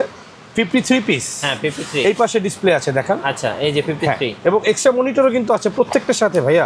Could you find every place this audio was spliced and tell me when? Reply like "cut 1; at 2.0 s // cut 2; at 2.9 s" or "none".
none

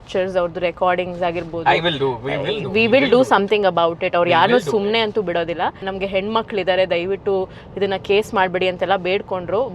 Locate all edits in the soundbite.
cut 1; at 5.9 s

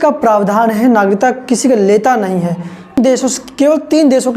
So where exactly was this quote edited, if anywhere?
cut 1; at 3.0 s

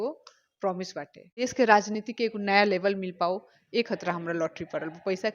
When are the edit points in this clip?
cut 1; at 1.3 s

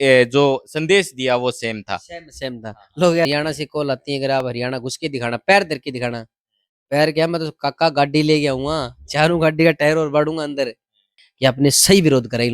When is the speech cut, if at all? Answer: cut 1; at 3.3 s // cut 2; at 11.2 s

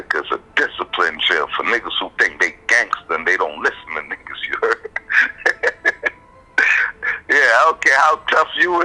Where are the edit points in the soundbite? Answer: none

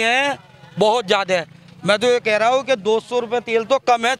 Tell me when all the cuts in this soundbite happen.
none

